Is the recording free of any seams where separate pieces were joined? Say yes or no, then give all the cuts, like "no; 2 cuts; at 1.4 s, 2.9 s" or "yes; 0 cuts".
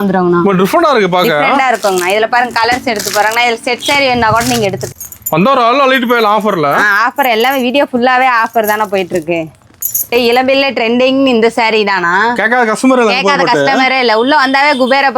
no; 2 cuts; at 4.8 s, 10.1 s